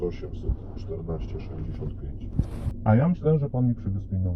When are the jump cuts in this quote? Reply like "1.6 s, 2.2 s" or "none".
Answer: 2.8 s